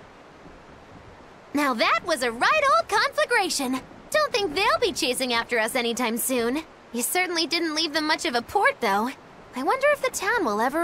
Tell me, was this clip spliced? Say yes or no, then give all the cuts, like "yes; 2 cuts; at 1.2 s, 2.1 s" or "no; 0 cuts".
yes; 1 cut; at 1.5 s